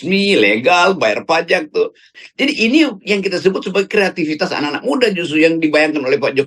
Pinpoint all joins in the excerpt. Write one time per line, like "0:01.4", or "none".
0:02.2